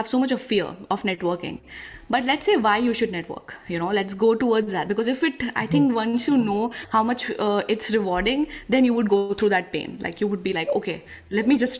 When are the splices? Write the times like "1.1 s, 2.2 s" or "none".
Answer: none